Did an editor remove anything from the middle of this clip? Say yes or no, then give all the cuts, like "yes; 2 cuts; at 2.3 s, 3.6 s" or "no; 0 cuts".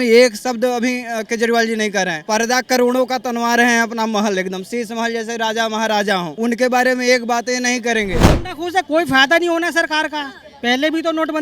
yes; 3 cuts; at 2.2 s, 6.3 s, 8.4 s